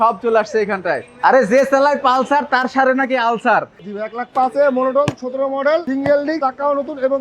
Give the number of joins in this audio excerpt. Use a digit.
2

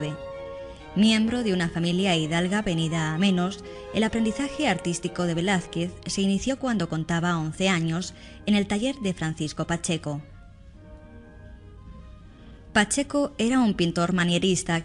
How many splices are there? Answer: 1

